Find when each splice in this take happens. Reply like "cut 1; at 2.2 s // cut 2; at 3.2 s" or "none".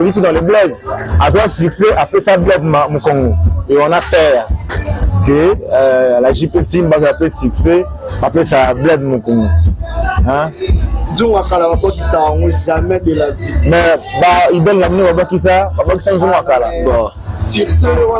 none